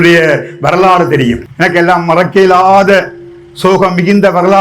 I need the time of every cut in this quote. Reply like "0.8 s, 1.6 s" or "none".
1.5 s